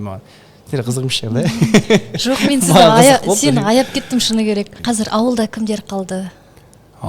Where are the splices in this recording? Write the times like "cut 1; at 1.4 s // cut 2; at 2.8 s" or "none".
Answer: cut 1; at 4.7 s